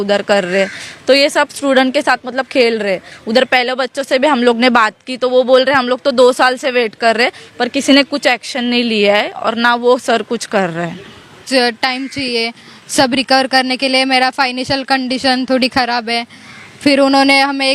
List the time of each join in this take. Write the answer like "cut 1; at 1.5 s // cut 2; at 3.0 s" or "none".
cut 1; at 11.4 s